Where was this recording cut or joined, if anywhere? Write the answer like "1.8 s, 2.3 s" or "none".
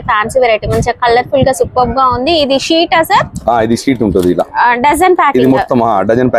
none